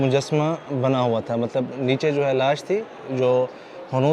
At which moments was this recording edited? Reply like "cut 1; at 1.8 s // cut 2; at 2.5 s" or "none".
none